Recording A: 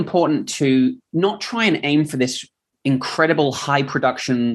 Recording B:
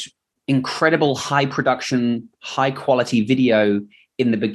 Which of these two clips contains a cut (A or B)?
A